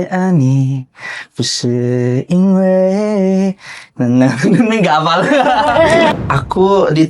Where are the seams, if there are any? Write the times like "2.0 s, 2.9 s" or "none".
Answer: 6.1 s